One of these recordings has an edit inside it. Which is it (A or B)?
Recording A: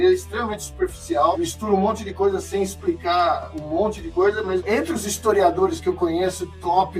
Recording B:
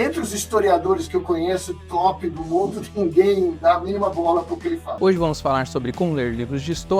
B